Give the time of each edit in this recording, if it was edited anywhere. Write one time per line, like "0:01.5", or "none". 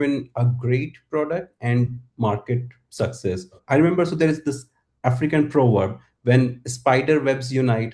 0:03.5